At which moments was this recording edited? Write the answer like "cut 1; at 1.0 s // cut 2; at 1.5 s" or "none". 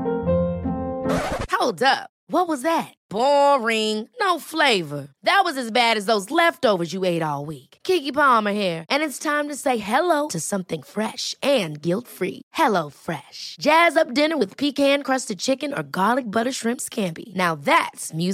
none